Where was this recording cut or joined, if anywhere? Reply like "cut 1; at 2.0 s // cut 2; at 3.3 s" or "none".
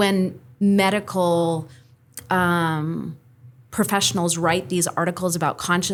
none